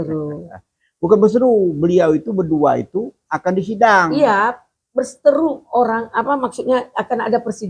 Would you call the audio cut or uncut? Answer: uncut